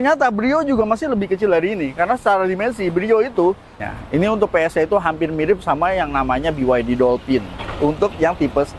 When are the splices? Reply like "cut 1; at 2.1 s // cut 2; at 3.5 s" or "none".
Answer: cut 1; at 3.7 s